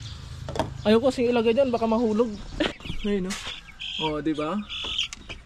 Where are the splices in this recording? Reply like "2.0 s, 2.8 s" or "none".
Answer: 2.7 s